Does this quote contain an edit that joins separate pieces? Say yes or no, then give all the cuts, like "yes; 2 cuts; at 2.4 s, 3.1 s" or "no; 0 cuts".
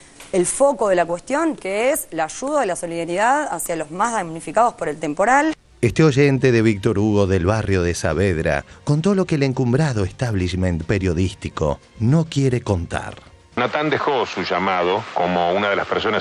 no; 0 cuts